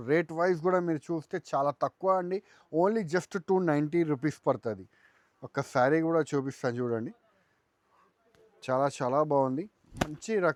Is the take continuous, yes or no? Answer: yes